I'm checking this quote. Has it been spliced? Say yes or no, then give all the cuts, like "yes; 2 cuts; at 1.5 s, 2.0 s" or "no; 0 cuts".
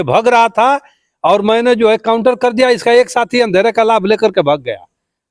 no; 0 cuts